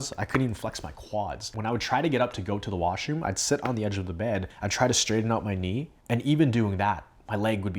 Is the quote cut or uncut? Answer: cut